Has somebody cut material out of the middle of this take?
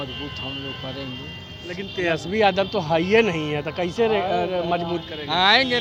no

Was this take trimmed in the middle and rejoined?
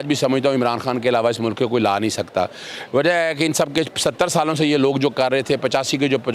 no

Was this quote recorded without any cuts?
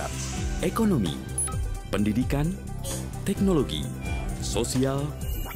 yes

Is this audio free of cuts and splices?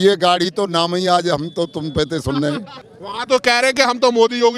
no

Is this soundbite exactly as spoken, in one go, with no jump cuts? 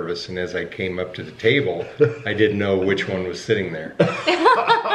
yes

